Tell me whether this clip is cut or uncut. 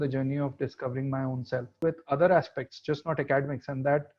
cut